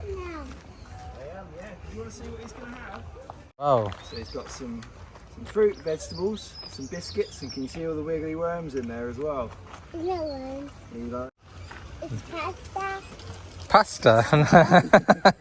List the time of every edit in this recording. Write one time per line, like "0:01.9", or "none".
0:03.6
0:11.3